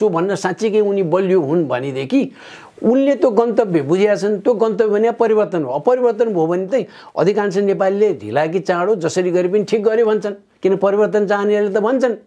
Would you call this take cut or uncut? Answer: uncut